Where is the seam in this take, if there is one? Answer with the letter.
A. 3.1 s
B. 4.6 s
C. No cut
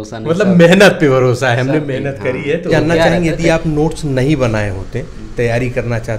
A